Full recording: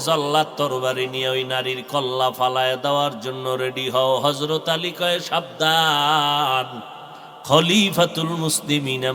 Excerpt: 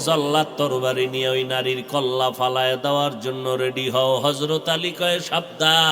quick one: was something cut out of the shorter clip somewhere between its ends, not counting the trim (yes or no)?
no